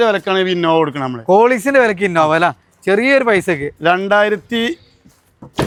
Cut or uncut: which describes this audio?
uncut